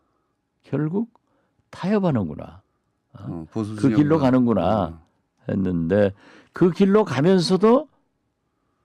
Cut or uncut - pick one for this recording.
cut